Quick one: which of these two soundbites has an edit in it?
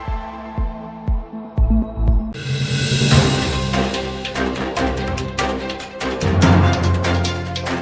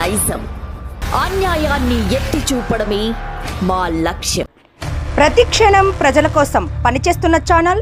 first; 1 cut; at 2.4 s

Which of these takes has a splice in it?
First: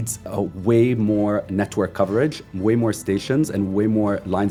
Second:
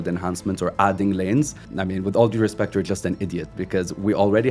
second; 1 cut; at 1.7 s

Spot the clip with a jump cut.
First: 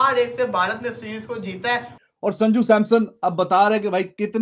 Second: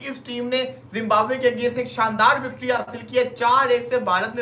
first; 1 cut; at 1.9 s

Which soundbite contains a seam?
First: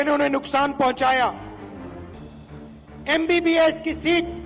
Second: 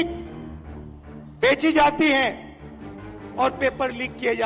first; 2 cuts; at 1.4 s, 3.0 s

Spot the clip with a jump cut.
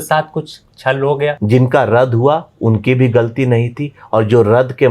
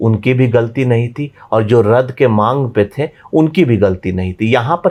first; 1 cut; at 1.4 s

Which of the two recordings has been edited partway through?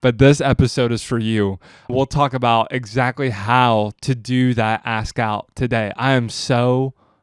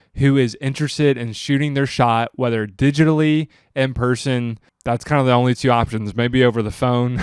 first; 1 cut; at 1.9 s

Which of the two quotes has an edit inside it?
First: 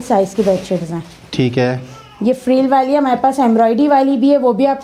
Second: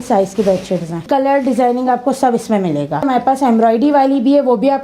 second; 2 cuts; at 1.0 s, 3.0 s

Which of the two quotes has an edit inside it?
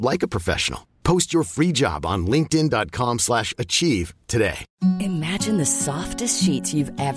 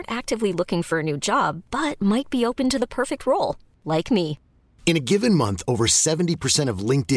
first; 1 cut; at 4.7 s

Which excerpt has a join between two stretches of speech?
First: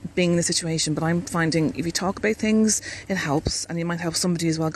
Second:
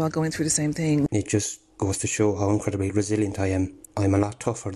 second; 2 cuts; at 1.1 s, 3.8 s

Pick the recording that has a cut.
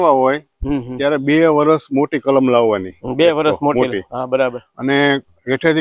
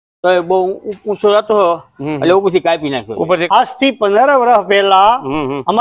second; 1 cut; at 3.4 s

